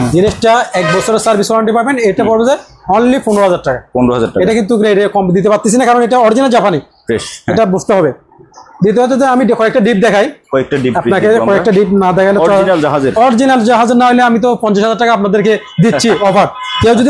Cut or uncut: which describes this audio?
uncut